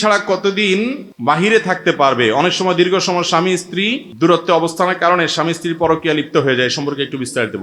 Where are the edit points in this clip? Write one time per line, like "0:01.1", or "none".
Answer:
0:01.1
0:04.0